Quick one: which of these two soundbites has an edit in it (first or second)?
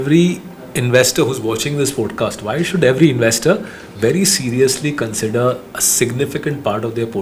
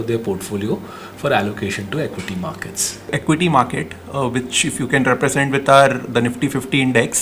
second